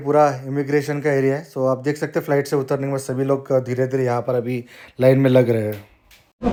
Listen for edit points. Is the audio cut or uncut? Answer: uncut